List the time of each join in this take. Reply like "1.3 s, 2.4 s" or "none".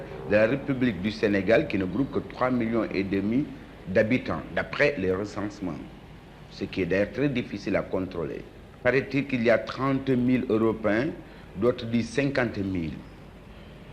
8.3 s